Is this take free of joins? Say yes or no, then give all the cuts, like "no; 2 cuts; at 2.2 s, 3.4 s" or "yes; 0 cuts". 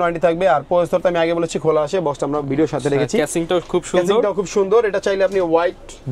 yes; 0 cuts